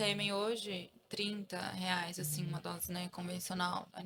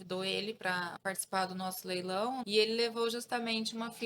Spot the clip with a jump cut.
second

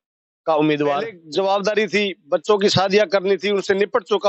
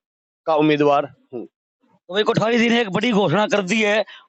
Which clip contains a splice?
first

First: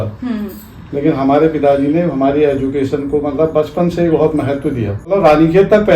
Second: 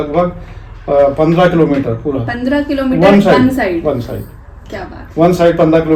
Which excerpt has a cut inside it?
first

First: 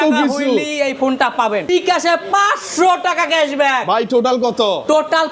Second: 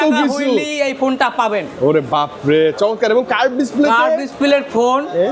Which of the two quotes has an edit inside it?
first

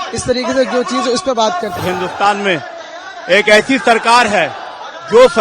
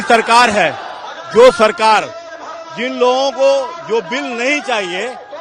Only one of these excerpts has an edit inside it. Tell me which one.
first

